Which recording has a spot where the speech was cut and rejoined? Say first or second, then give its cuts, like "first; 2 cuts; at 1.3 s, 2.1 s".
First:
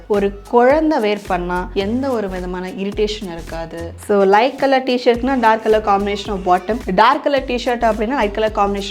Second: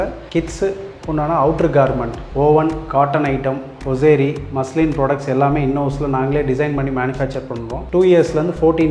first; 1 cut; at 3.9 s